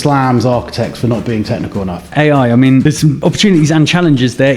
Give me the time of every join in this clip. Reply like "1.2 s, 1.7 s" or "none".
2.0 s, 3.1 s